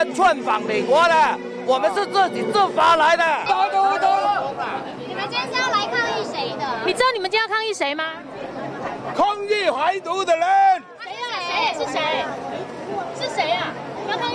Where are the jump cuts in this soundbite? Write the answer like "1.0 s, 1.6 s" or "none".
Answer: 3.4 s